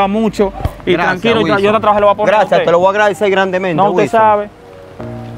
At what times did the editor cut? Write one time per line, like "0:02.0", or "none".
0:04.5